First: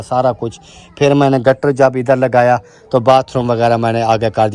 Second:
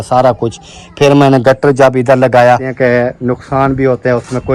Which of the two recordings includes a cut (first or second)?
second